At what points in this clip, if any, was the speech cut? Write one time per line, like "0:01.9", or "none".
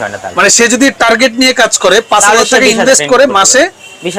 none